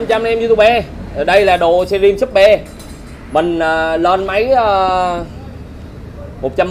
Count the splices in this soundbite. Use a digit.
0